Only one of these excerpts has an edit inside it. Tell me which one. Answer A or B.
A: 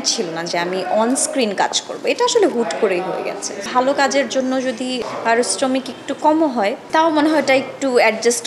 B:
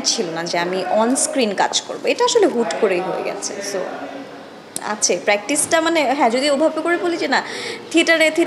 A